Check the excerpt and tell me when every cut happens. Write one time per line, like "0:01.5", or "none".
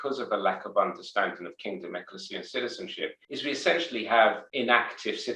0:03.2
0:04.4